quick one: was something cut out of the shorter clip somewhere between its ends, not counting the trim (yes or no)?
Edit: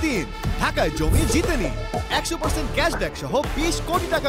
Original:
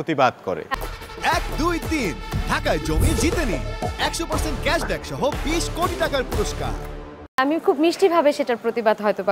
no